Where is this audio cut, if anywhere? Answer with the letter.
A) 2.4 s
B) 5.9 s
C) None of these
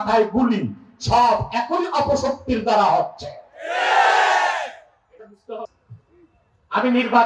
B